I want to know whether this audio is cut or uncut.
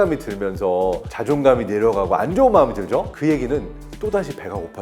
cut